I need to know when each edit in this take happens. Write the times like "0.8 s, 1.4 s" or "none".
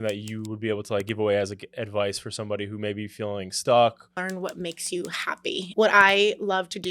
4.2 s, 5.6 s